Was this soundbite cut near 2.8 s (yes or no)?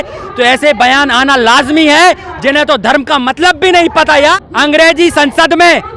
no